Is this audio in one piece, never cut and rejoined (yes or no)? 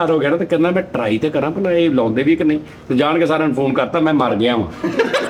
yes